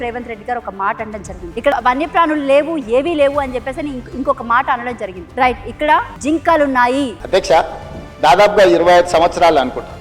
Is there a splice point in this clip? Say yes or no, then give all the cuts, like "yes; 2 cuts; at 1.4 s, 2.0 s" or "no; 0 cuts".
yes; 4 cuts; at 1.7 s, 5.2 s, 6.1 s, 7.2 s